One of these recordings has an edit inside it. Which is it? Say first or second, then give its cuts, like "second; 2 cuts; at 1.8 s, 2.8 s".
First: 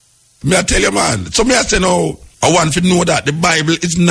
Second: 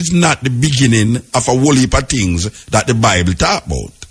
first; 1 cut; at 2.2 s